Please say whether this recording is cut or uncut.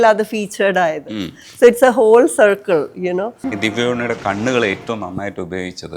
cut